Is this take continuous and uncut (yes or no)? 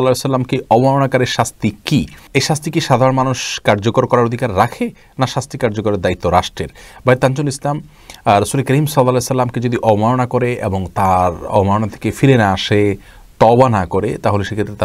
yes